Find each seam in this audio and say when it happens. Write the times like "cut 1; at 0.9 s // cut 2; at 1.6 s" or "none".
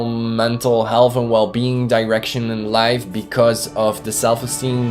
none